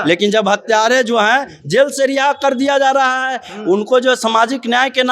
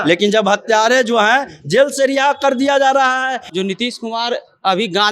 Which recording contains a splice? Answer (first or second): second